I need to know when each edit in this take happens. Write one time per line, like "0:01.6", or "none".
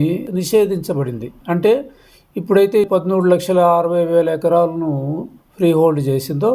0:02.8